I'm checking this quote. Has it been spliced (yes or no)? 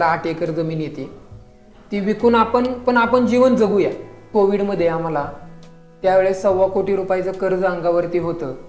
yes